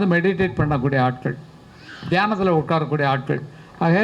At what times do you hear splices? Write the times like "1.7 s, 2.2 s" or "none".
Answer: none